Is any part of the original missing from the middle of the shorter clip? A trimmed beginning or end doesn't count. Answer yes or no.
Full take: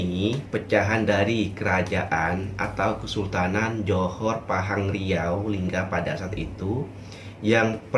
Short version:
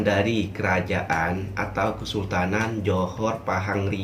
no